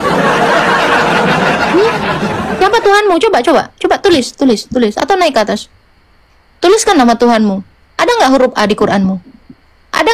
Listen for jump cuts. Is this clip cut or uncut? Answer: uncut